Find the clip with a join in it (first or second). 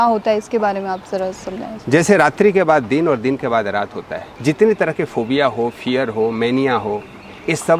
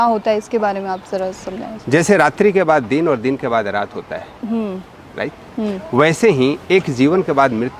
first